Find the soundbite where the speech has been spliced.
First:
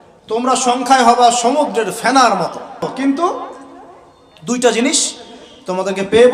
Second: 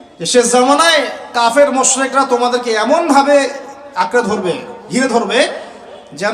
first; 1 cut; at 2.8 s

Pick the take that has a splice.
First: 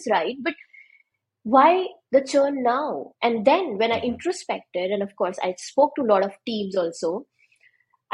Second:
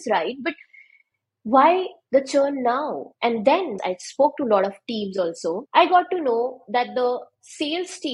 second; 2 cuts; at 3.7 s, 5.6 s

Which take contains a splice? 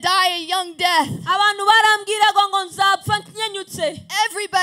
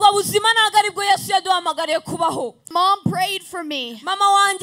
second; 1 cut; at 2.7 s

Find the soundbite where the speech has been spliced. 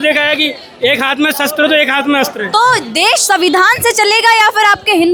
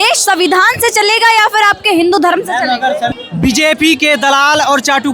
second; 1 cut; at 3.1 s

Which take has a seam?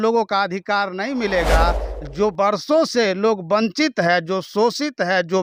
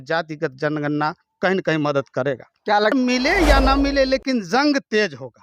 second; 1 cut; at 2.9 s

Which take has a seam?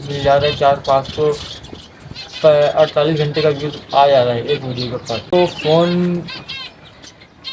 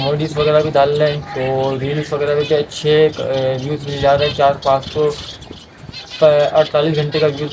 first; 1 cut; at 5.3 s

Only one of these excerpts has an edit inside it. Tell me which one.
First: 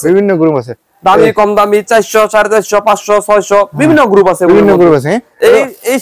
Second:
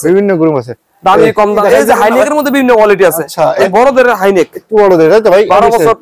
second; 2 cuts; at 1.6 s, 3.6 s

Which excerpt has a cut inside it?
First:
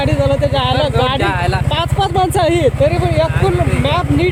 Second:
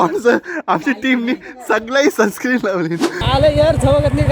second; 1 cut; at 3.0 s

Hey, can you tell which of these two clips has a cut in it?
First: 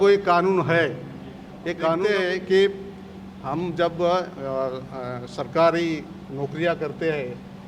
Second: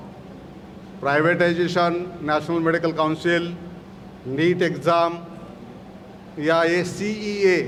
first; 1 cut; at 2.0 s

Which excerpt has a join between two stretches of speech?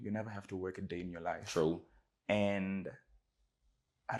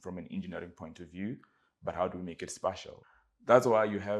second; 1 cut; at 2.9 s

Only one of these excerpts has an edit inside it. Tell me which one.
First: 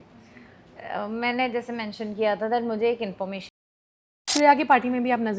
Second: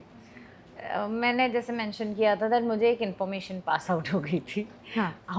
first; 1 cut; at 3.7 s

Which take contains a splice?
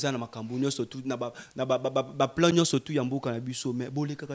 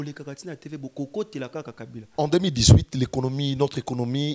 second; 1 cut; at 2.0 s

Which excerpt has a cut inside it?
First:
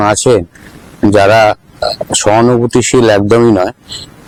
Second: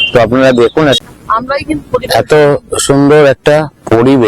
second; 1 cut; at 1.0 s

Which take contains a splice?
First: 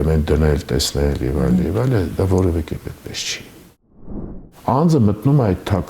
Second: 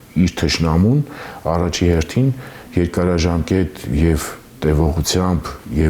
first; 1 cut; at 4.0 s

